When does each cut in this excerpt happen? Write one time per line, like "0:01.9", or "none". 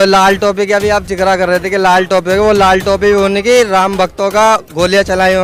none

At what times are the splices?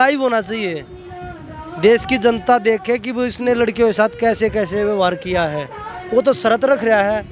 0:05.9

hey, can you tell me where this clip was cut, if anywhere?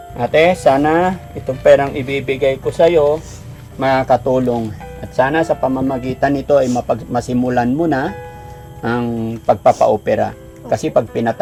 none

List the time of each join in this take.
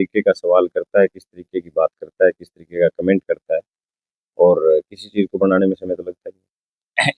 none

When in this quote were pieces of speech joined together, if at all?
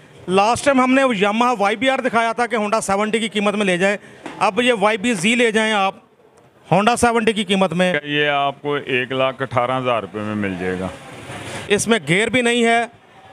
0:08.0
0:11.5

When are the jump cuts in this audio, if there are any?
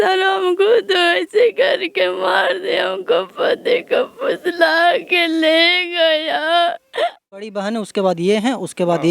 0:07.4

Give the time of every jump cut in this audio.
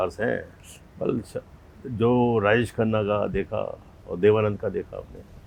none

